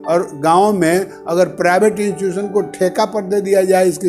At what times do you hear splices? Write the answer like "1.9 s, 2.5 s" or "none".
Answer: none